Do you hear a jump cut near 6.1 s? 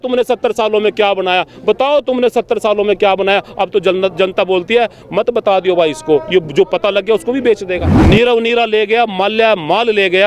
no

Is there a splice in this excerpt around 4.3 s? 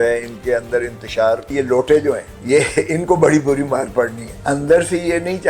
yes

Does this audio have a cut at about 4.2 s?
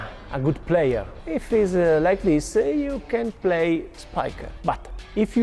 yes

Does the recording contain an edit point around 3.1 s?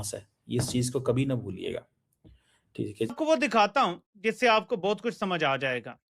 yes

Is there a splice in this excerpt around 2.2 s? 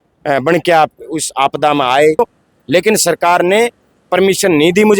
yes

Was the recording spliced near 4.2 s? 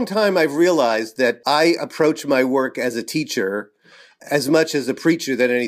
no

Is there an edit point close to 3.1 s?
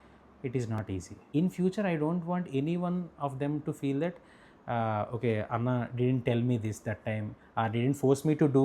no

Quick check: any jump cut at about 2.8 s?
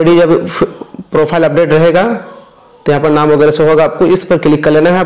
no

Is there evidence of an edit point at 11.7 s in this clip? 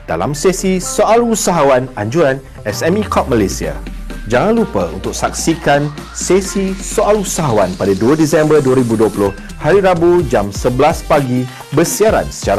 no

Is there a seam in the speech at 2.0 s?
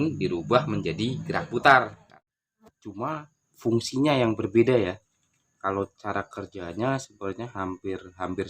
yes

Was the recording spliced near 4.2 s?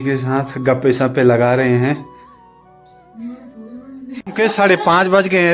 yes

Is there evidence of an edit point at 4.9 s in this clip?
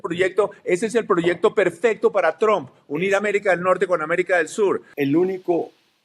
yes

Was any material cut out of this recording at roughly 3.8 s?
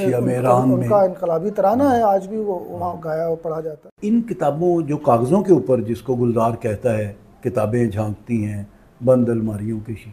yes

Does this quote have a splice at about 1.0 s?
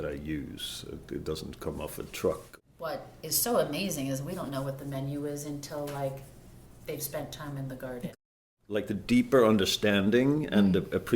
no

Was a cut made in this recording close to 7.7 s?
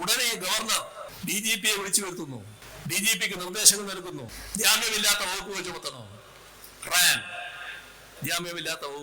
no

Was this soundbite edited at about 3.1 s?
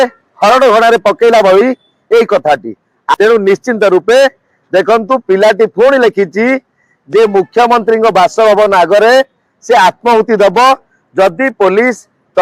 yes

